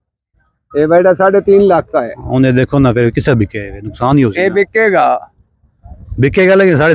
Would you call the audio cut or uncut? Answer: uncut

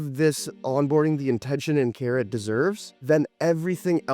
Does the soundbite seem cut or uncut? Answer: cut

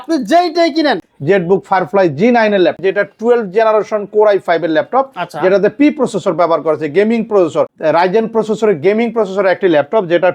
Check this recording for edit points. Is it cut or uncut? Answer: cut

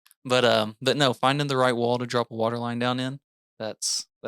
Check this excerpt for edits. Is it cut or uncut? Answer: cut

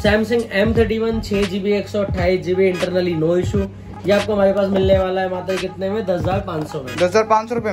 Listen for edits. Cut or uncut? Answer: uncut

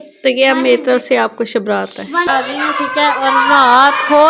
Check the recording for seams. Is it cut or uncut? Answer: cut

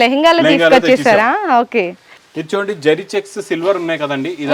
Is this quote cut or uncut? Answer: cut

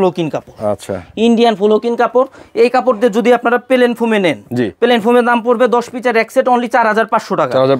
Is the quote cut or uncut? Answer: uncut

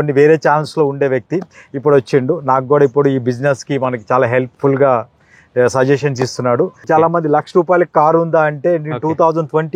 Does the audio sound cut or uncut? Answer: cut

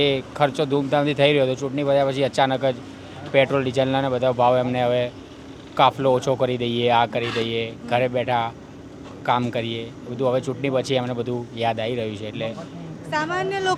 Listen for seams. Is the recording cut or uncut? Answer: uncut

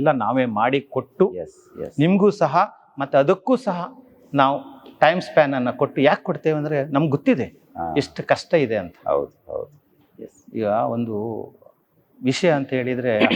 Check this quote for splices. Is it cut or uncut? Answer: uncut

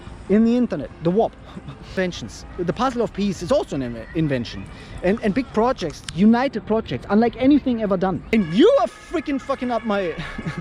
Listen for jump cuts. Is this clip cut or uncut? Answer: cut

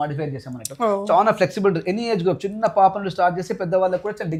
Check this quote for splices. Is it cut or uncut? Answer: uncut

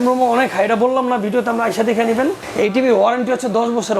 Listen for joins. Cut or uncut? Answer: cut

